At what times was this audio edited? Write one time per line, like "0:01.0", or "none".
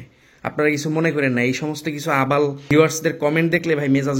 0:02.6

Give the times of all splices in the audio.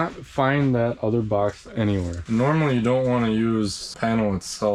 0:02.1

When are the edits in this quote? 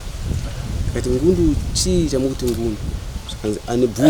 none

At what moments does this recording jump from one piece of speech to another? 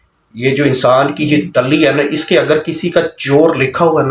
none

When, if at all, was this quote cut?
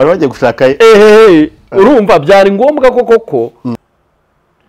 0:03.8

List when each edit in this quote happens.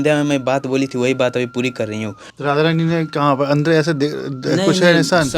0:02.3

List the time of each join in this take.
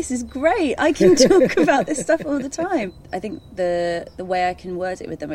0:03.0

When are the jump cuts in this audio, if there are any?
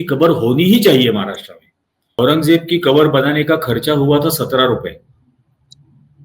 0:02.0

